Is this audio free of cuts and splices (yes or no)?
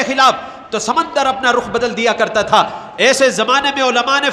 yes